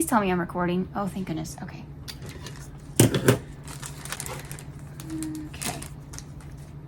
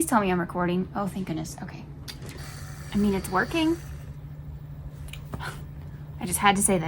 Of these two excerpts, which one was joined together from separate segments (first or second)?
second